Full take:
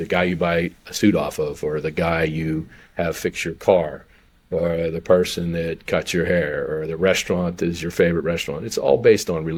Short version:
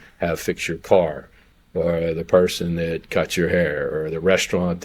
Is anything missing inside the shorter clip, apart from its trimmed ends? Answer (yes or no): no